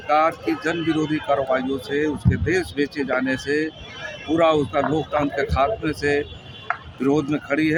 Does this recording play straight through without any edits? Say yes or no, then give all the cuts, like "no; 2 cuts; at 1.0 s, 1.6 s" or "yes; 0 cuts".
yes; 0 cuts